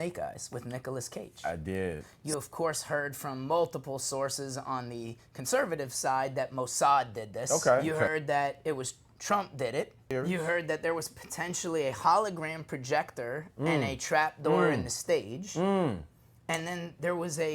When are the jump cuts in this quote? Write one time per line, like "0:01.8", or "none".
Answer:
0:02.1
0:07.4
0:10.1